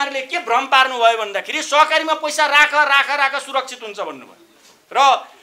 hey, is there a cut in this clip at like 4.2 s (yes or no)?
no